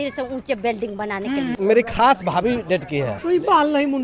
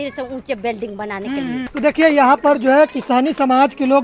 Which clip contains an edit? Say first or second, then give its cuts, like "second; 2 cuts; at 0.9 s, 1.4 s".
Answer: first; 2 cuts; at 1.6 s, 3.1 s